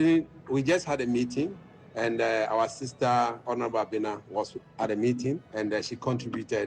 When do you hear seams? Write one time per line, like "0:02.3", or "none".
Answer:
0:05.5